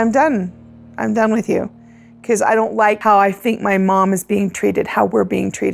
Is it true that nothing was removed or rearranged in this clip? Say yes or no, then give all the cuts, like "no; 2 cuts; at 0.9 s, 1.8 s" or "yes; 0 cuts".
no; 1 cut; at 3.0 s